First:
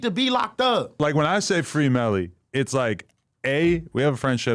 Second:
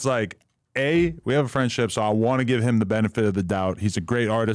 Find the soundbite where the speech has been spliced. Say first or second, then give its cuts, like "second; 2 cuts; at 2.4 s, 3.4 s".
first; 1 cut; at 1.0 s